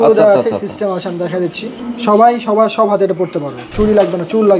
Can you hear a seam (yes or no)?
yes